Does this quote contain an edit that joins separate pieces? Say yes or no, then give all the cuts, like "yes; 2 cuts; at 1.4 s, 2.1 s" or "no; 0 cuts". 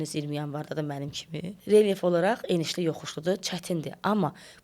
yes; 1 cut; at 1.5 s